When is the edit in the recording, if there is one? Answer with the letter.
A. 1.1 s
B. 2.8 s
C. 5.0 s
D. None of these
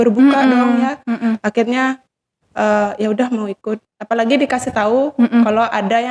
D